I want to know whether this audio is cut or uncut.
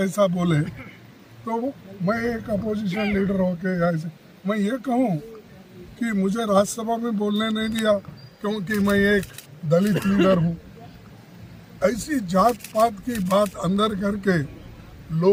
uncut